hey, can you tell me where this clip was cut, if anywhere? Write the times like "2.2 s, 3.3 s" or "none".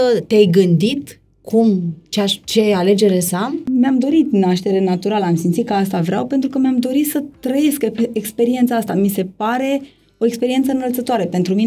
3.6 s